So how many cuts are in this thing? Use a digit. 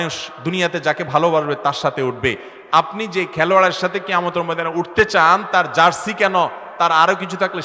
0